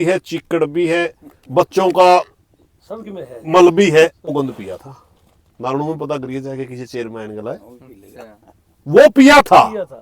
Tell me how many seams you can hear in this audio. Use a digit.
1